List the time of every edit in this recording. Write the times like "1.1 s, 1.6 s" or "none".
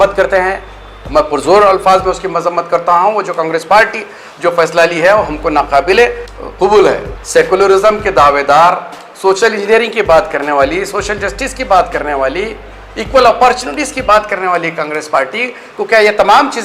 7.2 s

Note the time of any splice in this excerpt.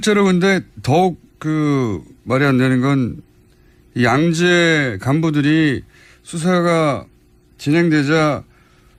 none

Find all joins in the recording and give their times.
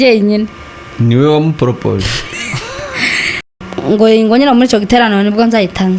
3.4 s

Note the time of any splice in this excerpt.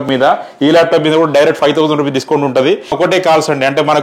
2.9 s

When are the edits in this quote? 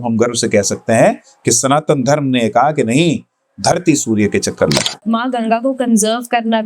5.0 s

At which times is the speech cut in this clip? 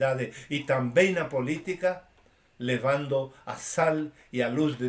none

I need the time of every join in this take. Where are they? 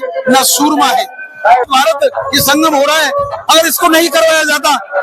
1.7 s

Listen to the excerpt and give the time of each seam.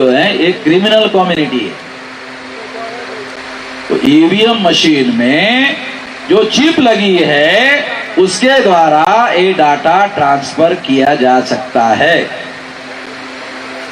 3.4 s

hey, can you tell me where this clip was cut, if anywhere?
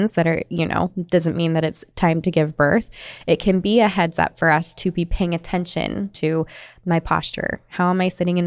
6.2 s

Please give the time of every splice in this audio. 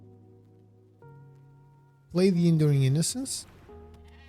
3.4 s

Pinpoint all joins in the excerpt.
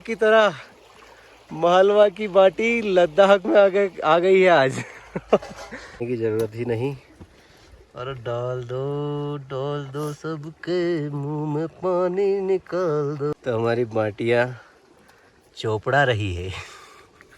6.0 s, 13.3 s

